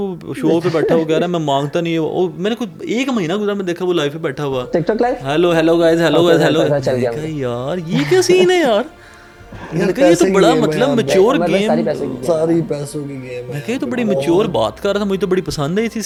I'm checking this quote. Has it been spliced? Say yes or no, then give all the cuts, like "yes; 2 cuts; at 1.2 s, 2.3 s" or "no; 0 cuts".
no; 0 cuts